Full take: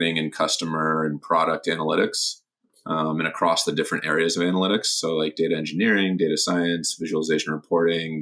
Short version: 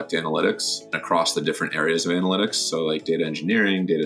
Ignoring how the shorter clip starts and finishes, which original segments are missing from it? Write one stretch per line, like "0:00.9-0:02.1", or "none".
0:02.5-0:03.3